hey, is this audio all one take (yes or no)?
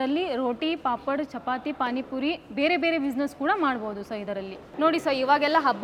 yes